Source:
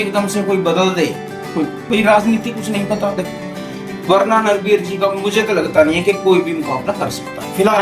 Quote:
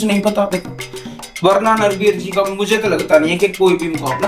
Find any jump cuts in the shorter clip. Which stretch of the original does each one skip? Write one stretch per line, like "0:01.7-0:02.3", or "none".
none